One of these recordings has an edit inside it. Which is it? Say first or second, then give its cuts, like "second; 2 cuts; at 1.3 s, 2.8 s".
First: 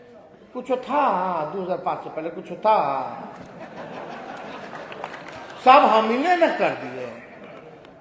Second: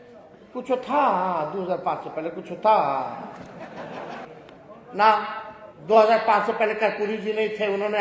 second; 1 cut; at 4.2 s